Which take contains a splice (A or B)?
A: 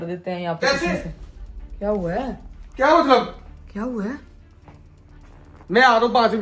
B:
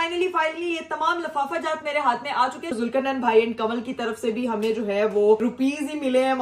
B